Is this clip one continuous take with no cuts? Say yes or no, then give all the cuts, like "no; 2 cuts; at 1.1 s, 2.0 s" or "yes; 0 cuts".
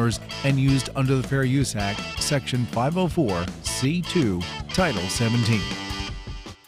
no; 1 cut; at 5.8 s